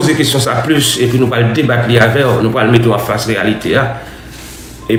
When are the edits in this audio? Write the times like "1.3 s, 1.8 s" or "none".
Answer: none